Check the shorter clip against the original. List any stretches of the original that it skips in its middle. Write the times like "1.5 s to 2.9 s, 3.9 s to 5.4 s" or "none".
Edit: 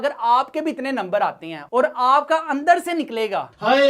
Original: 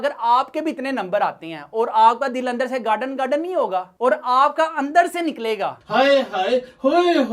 1.6 s to 3.9 s